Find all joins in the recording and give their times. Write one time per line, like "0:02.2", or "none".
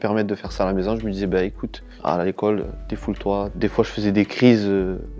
0:03.5